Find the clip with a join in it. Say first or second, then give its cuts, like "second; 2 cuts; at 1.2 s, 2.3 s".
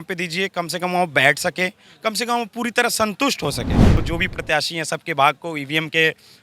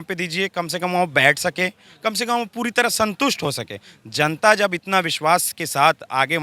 first; 1 cut; at 4.0 s